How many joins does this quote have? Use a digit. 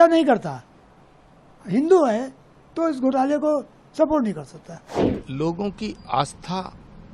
1